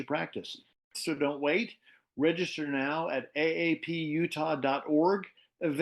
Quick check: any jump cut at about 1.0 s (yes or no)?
yes